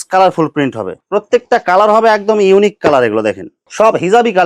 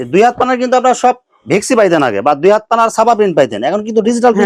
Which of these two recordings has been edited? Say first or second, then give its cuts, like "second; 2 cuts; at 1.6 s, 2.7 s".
first; 2 cuts; at 0.9 s, 3.6 s